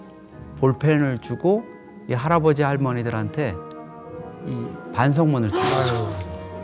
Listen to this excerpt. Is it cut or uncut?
uncut